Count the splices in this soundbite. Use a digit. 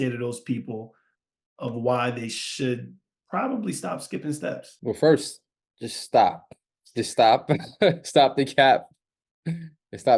1